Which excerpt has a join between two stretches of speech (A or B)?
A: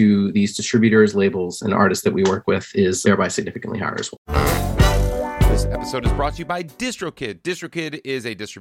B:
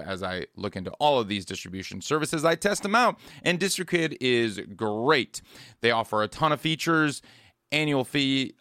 A